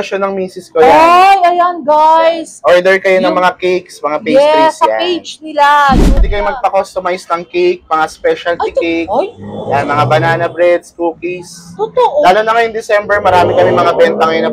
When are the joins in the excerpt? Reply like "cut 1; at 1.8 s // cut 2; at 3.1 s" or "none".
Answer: cut 1; at 6.2 s